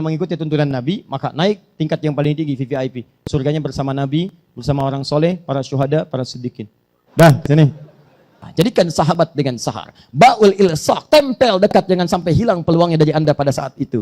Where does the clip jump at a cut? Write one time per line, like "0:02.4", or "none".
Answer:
0:08.4